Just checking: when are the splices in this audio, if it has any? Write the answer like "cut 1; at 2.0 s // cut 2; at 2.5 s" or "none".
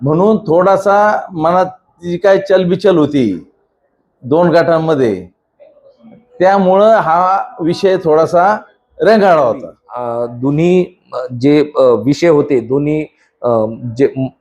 cut 1; at 10.2 s